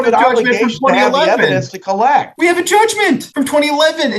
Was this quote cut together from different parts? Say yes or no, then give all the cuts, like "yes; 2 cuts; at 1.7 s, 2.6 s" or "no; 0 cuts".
yes; 2 cuts; at 2.3 s, 3.3 s